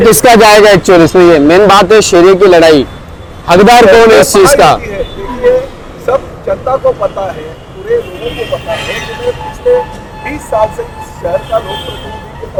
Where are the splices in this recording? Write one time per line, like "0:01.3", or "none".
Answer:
none